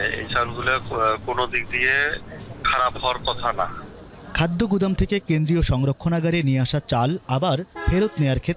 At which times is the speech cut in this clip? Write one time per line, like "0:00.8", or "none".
none